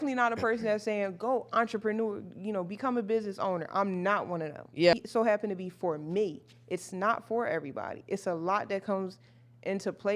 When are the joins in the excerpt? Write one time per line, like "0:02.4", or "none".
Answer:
0:04.9